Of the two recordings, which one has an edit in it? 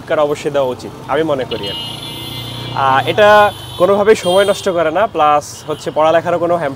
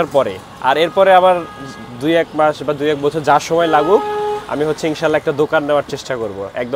first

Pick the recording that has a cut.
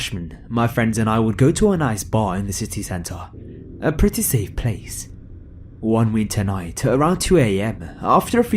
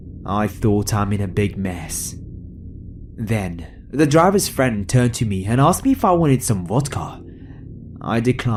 first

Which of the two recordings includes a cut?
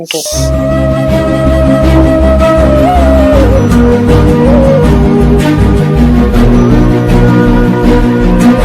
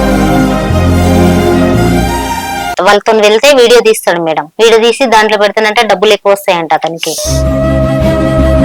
second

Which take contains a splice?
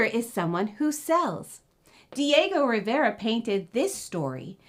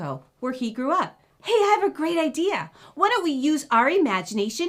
second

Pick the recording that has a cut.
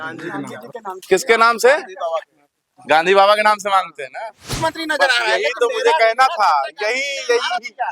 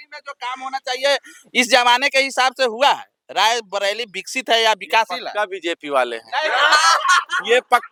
first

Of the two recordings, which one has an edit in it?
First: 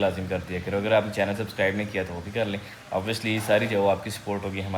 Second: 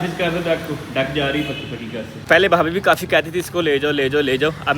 second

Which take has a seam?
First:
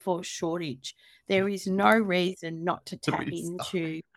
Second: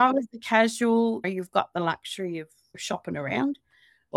second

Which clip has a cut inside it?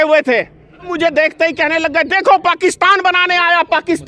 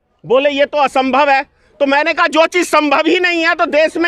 first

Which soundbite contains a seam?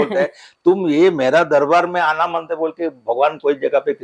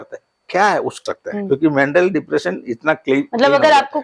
second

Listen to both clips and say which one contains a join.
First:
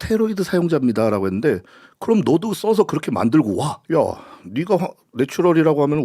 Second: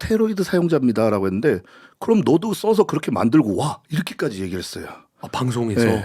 first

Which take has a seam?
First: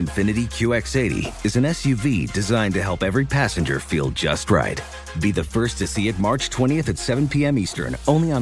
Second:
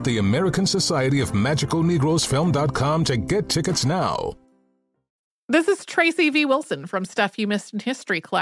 second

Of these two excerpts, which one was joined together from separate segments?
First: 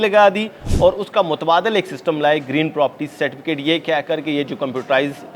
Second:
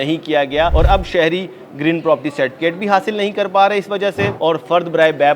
second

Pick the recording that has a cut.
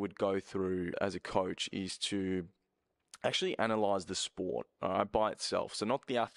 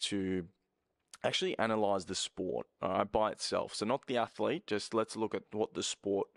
first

